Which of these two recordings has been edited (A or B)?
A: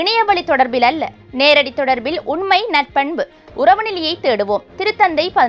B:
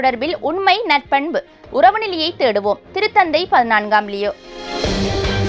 B